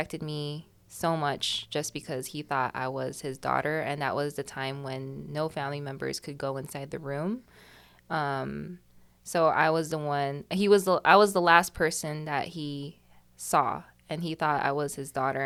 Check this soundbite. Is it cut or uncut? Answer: uncut